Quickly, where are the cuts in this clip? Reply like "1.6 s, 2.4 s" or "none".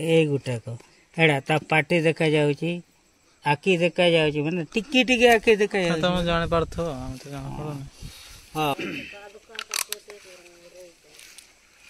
8.7 s